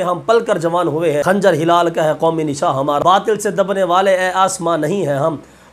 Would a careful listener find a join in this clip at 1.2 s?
yes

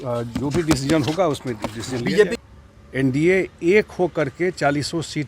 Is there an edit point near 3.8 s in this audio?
no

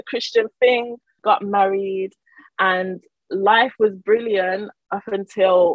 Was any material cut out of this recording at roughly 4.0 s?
no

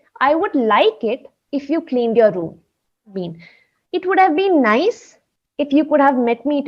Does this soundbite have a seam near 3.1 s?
yes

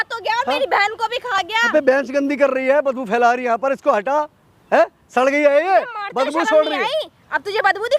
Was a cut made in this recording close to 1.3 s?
yes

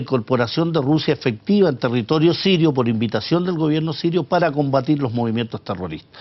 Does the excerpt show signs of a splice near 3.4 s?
yes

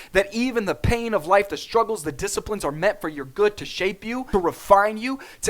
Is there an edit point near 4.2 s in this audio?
yes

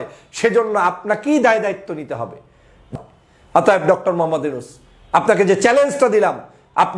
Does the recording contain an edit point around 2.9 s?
yes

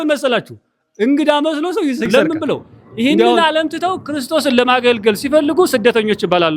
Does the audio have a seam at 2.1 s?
yes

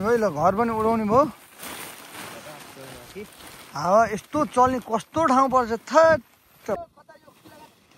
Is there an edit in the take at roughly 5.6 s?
no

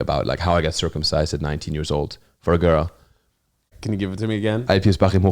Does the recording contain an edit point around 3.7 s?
yes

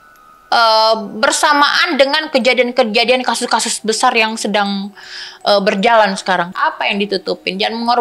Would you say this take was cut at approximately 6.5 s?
yes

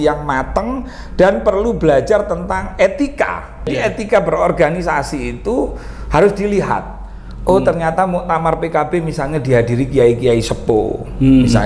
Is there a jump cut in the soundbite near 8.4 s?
no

